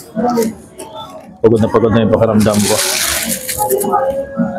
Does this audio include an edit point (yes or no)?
no